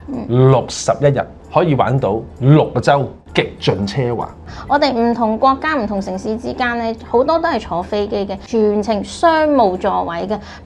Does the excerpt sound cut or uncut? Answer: cut